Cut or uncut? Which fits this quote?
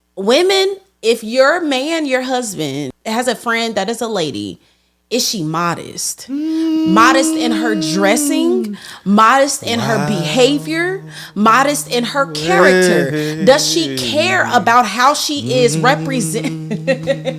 cut